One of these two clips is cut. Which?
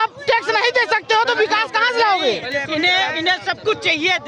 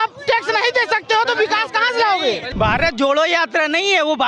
second; 1 cut; at 2.5 s

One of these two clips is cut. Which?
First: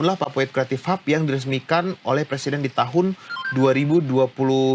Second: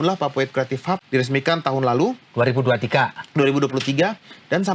second; 1 cut; at 1.0 s

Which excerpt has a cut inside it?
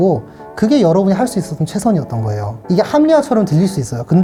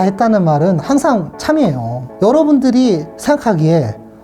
second; 1 cut; at 3.1 s

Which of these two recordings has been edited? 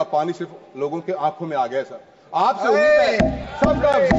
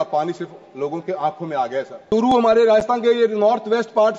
second; 1 cut; at 2.1 s

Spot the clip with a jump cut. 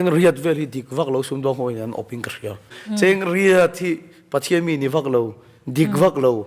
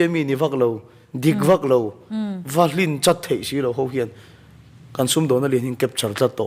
first; 1 cut; at 2.7 s

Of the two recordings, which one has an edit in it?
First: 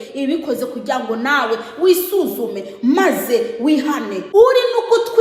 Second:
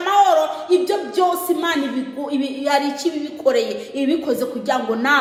first; 1 cut; at 4.2 s

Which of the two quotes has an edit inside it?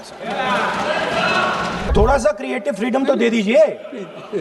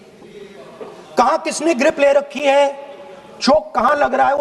first; 1 cut; at 1.8 s

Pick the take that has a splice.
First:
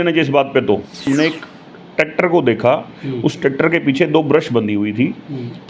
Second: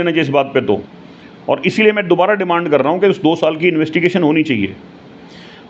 first; 1 cut; at 1.1 s

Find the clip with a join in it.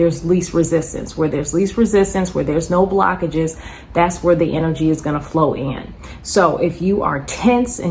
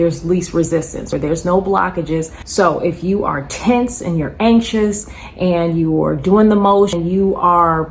second; 3 cuts; at 1.1 s, 2.4 s, 7.0 s

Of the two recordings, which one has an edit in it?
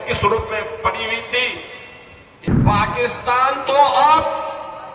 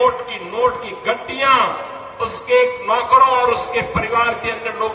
first; 1 cut; at 2.3 s

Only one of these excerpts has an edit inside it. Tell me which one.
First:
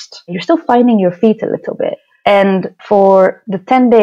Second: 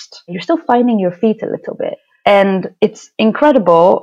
first; 1 cut; at 2.7 s

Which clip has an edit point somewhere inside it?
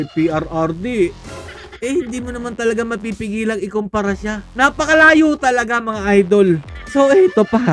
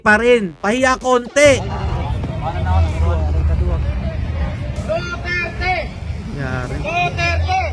first; 1 cut; at 6.8 s

